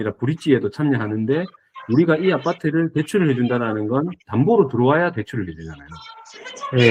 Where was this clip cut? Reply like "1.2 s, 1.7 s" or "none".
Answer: none